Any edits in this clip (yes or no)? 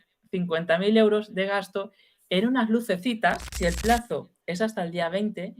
yes